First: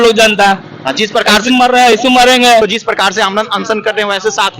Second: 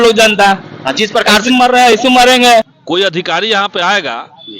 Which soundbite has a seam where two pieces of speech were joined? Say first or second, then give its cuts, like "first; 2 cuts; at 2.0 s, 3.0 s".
second; 1 cut; at 2.6 s